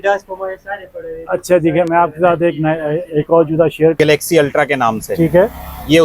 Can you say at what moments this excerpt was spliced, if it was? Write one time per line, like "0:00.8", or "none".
0:03.9